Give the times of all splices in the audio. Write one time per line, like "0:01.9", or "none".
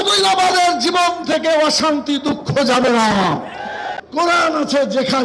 0:03.9